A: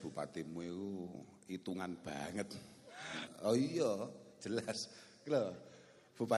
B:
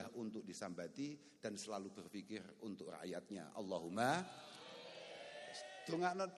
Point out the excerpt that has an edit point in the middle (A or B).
A